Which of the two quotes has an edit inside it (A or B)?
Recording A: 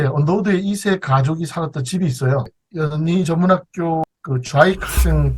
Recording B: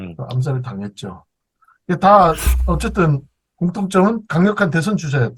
A